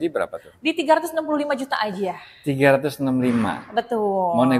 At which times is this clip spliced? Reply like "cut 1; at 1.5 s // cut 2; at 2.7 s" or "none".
none